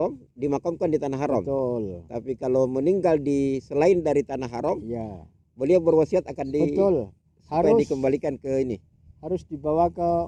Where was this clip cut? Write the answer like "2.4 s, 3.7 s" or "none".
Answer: none